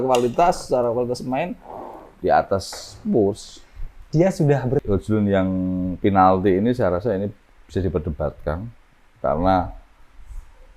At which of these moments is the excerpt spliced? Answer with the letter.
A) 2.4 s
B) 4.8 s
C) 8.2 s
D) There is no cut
B